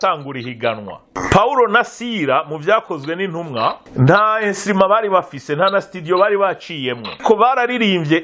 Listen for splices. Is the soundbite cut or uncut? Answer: cut